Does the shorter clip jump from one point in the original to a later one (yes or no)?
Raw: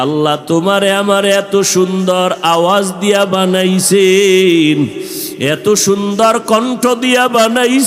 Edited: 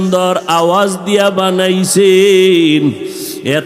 no